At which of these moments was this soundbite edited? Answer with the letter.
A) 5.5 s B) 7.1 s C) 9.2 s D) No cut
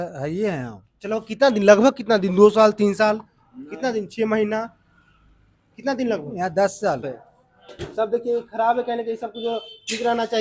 B